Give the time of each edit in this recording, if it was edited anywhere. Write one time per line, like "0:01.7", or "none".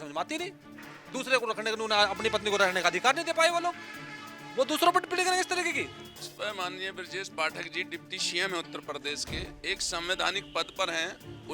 0:06.3